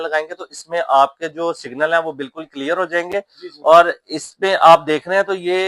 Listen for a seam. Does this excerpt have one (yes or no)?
no